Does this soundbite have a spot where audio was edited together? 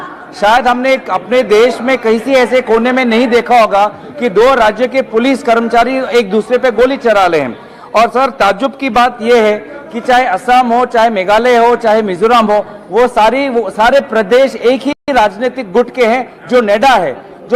no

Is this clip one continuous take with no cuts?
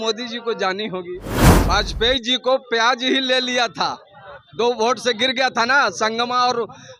yes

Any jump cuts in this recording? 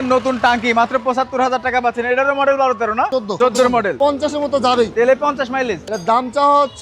yes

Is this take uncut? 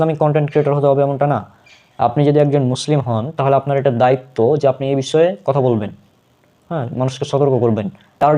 yes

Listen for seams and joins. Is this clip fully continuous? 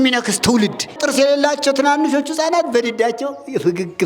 no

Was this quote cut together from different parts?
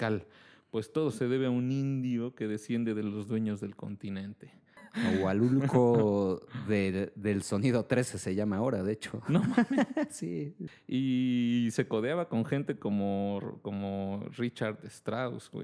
yes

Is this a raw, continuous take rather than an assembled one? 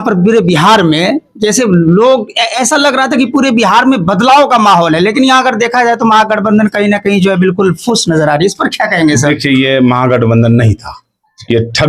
yes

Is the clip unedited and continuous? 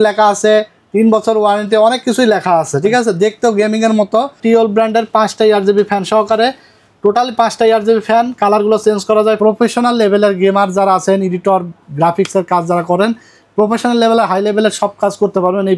no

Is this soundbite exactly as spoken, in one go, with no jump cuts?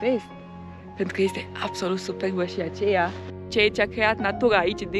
no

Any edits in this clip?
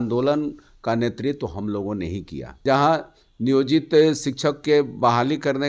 yes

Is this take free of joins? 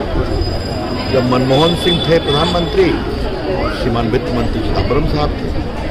yes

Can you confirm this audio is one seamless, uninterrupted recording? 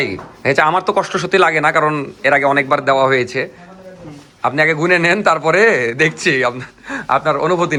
yes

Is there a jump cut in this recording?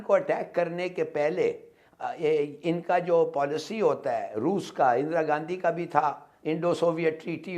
no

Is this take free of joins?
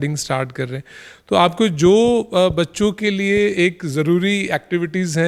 yes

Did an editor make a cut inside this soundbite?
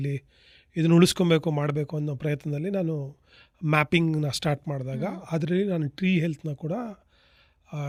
no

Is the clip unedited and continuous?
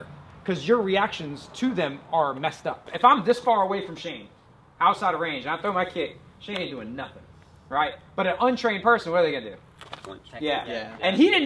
no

